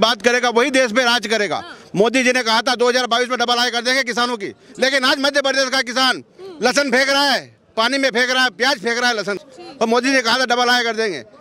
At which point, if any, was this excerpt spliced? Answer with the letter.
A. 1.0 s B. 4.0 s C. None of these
C